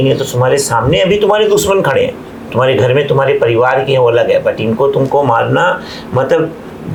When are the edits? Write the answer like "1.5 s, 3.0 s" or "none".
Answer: none